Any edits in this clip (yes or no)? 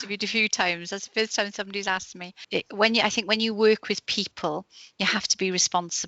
yes